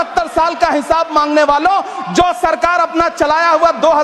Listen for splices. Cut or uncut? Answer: uncut